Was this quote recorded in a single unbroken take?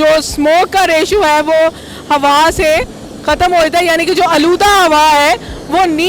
yes; 0 cuts

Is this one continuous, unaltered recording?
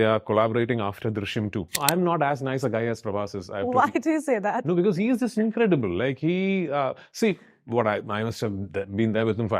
no; 1 cut; at 1.8 s

